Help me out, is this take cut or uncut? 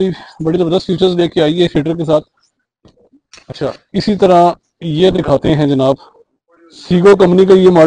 uncut